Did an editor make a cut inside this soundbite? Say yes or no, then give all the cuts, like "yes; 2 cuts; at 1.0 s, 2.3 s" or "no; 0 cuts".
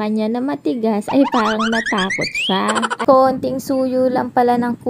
yes; 1 cut; at 3.0 s